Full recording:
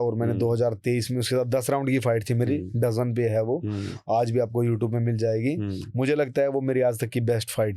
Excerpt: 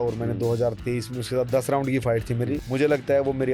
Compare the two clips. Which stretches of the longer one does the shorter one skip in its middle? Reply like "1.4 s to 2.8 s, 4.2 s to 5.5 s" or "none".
2.6 s to 5.9 s